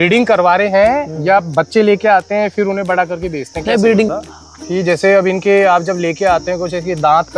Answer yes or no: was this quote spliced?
yes